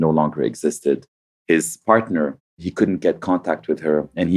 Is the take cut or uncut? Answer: cut